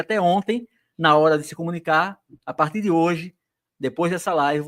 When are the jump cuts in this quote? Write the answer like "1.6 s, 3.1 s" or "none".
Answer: none